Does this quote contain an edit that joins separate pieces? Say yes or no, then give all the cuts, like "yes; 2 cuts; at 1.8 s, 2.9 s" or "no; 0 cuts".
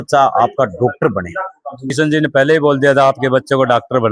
yes; 1 cut; at 1.9 s